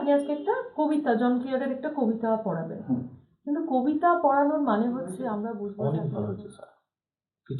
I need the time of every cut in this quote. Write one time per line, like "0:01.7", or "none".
0:05.7